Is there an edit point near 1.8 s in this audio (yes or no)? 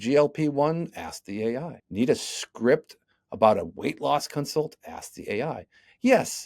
yes